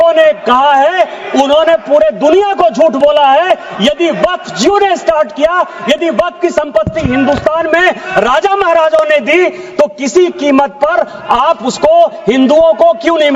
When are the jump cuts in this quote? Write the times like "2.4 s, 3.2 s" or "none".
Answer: none